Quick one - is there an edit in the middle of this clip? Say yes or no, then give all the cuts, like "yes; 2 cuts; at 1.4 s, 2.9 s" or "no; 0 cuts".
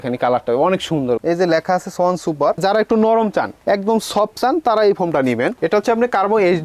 yes; 3 cuts; at 1.2 s, 2.6 s, 5.5 s